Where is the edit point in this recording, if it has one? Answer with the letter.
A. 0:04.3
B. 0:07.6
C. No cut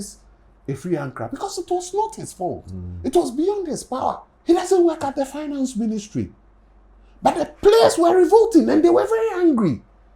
A